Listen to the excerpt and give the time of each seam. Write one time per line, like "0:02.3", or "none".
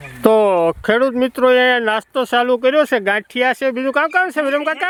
none